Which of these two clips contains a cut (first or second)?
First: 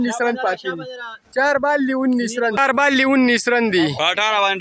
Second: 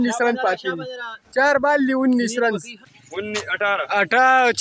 first